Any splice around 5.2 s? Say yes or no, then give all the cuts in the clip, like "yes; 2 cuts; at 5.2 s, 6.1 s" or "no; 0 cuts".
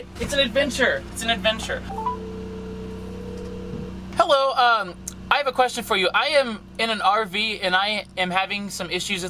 no; 1 cut; at 1.8 s